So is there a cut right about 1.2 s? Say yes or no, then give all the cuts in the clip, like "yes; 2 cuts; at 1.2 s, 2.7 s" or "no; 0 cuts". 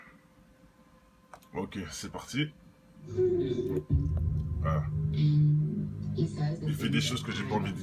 no; 1 cut; at 5.3 s